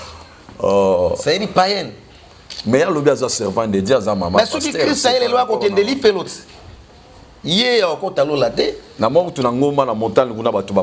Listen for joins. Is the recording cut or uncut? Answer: uncut